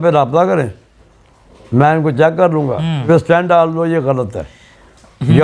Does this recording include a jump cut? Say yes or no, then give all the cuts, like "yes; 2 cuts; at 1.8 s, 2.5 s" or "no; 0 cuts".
yes; 1 cut; at 3.1 s